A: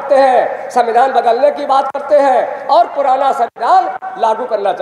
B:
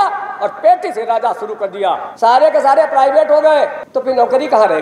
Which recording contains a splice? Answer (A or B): B